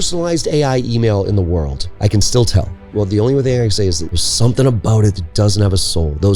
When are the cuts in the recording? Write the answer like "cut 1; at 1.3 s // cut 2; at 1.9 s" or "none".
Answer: cut 1; at 1.8 s // cut 2; at 2.9 s // cut 3; at 4.1 s

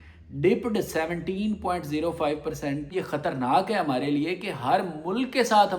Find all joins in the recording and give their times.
cut 1; at 2.9 s

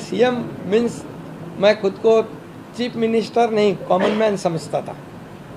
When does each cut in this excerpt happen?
none

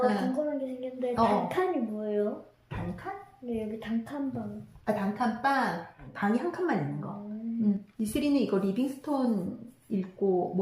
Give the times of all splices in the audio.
cut 1; at 5.9 s // cut 2; at 7.9 s

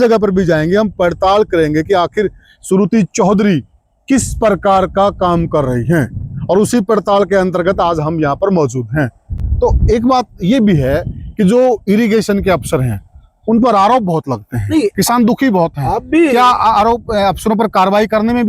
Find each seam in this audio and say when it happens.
none

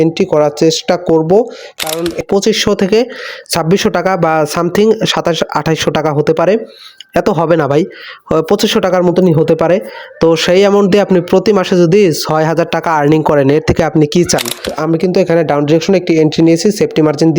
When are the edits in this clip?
cut 1; at 2.2 s // cut 2; at 14.7 s

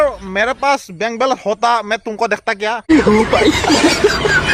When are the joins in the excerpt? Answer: none

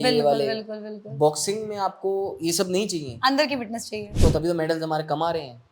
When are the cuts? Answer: cut 1; at 4.1 s

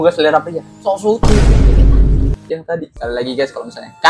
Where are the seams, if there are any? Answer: cut 1; at 2.9 s

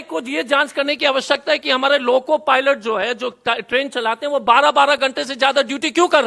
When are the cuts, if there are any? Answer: none

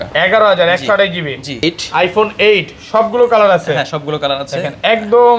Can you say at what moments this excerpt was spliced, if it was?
cut 1; at 1.6 s

